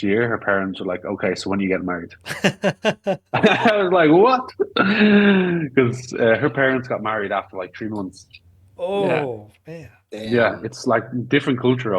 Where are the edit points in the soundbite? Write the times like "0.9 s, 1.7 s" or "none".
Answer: none